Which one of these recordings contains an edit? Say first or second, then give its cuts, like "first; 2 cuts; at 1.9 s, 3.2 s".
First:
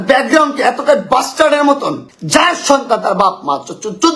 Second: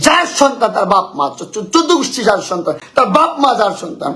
second; 1 cut; at 2.8 s